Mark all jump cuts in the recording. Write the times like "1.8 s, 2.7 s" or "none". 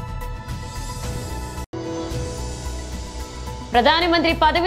1.1 s, 3.3 s